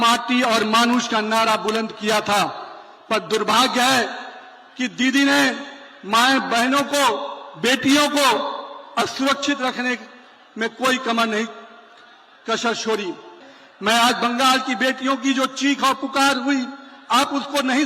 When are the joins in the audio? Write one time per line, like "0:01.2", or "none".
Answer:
0:13.3